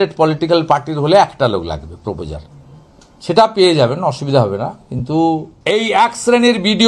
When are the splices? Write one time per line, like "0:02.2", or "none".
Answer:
0:05.5